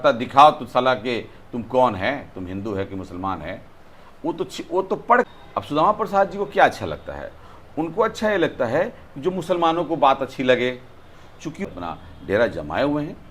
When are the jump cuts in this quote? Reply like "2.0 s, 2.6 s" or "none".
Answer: 5.3 s, 11.7 s